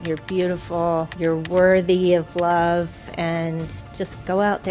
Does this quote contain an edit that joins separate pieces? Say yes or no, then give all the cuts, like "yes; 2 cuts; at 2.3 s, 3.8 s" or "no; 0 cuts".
yes; 1 cut; at 1.1 s